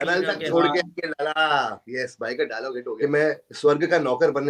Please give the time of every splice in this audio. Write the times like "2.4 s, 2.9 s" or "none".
2.8 s